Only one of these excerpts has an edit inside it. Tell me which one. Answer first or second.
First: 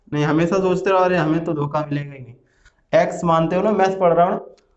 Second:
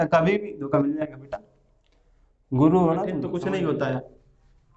second